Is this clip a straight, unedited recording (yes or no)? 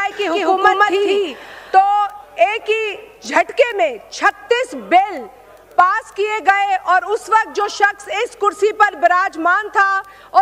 yes